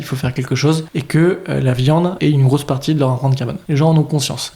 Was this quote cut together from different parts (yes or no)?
yes